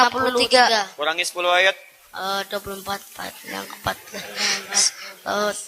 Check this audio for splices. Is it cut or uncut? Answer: uncut